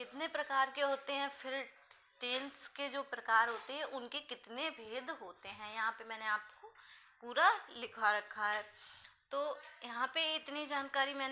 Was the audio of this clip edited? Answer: no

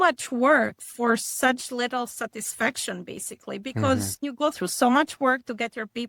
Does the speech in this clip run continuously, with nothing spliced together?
no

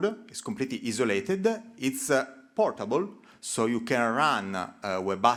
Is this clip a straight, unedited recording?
yes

